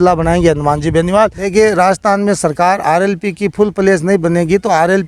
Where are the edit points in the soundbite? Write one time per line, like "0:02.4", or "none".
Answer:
0:01.4